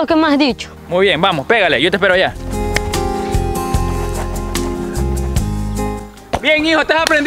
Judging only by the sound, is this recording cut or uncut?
cut